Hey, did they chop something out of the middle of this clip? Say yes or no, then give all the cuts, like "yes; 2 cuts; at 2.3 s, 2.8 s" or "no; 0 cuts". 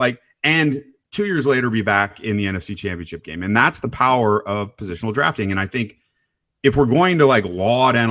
yes; 1 cut; at 2.2 s